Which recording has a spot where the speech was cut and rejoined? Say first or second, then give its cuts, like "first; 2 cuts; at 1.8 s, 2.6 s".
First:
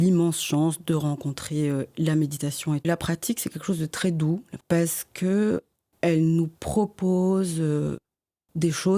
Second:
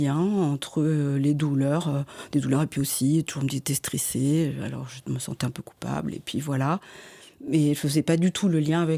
first; 2 cuts; at 2.9 s, 4.5 s